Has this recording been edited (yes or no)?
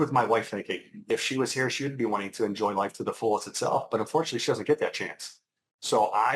yes